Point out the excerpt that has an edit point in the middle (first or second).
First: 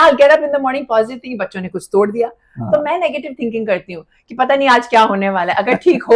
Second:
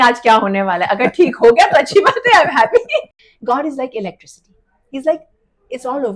second